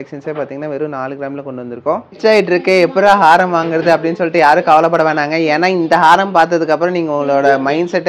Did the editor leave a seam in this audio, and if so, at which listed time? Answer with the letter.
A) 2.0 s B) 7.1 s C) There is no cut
A